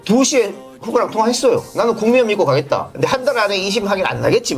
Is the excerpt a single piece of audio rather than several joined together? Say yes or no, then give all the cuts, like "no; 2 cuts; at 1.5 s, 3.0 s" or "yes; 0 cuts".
no; 2 cuts; at 1.7 s, 2.9 s